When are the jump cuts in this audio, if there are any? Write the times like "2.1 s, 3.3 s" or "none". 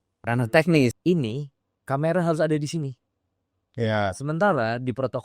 1.0 s

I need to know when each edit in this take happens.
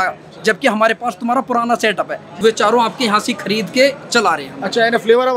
2.3 s

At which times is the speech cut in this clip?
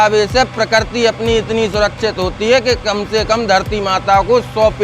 none

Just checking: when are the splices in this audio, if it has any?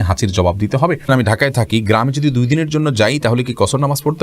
1.0 s

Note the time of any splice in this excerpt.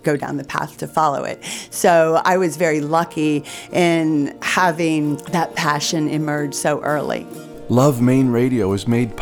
4.4 s, 5.2 s, 7.4 s

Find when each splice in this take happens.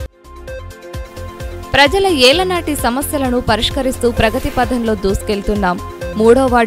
1.0 s

